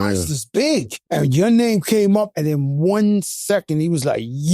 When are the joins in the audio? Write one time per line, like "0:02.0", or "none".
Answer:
0:00.9

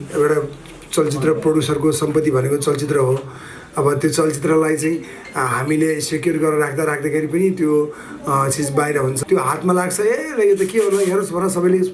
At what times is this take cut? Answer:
0:09.2

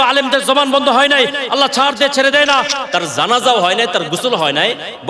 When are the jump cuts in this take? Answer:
0:02.8

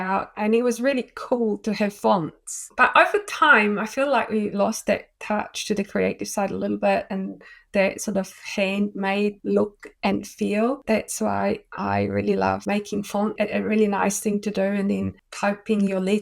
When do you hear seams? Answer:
0:02.6
0:10.8
0:13.3

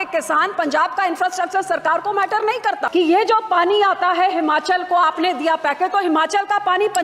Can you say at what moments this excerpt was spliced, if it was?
0:02.8

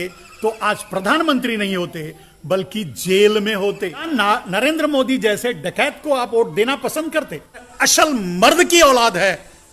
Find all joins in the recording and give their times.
0:04.1
0:07.8

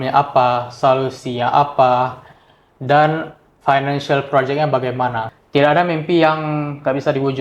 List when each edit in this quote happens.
0:05.3

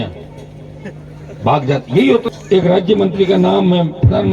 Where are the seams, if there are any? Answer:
0:02.3

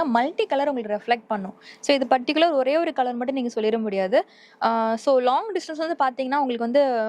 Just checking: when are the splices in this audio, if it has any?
none

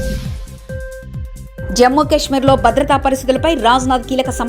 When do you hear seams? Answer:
0:01.6

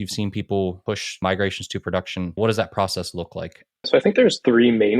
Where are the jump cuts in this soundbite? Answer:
0:01.2
0:02.4
0:04.1

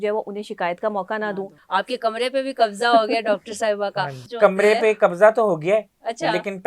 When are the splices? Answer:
0:01.6
0:04.2

